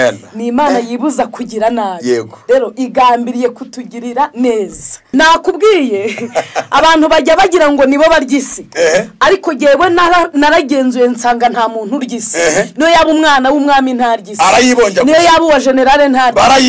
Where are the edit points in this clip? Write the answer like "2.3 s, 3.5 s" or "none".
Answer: 5.0 s